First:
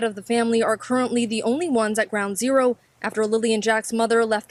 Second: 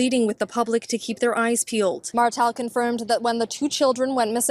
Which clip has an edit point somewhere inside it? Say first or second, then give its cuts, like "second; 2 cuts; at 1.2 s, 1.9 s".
second; 1 cut; at 2.0 s